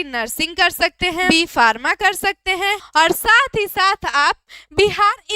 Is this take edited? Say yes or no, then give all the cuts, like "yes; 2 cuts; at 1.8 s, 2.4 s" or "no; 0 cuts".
yes; 2 cuts; at 1.3 s, 2.8 s